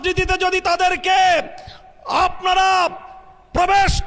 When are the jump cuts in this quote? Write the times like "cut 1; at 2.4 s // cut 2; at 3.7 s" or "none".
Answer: none